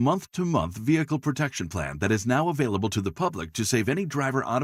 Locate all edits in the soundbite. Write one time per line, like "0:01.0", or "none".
none